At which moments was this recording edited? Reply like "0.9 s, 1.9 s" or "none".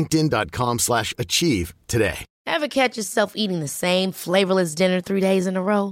2.3 s

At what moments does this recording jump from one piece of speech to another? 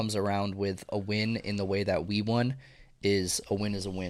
none

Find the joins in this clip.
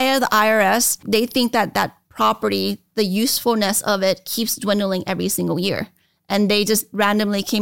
1.0 s

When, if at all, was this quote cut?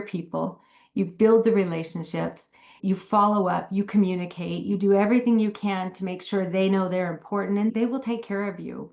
7.7 s

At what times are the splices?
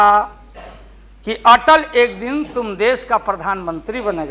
none

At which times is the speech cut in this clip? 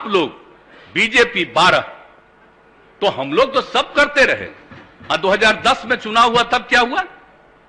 none

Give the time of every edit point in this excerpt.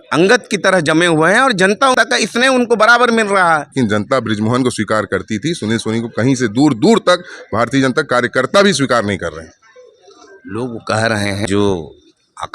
1.9 s, 3.7 s, 11.5 s

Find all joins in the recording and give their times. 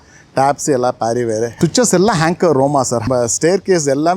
1.5 s, 3.0 s

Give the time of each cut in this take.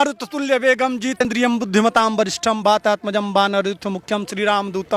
1.2 s

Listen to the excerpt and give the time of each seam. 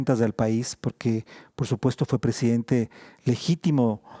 none

